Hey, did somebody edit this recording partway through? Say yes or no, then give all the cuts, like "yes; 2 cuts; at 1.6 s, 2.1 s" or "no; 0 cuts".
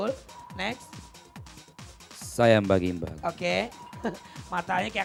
no; 0 cuts